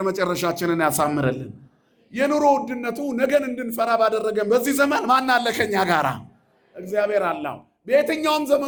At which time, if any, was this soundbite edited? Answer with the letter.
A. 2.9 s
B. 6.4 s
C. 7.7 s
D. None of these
D